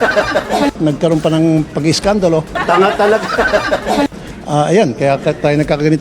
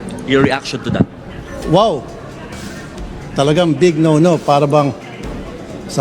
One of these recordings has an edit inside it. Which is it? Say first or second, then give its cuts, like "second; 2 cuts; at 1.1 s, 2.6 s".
first; 3 cuts; at 0.8 s, 2.6 s, 4.3 s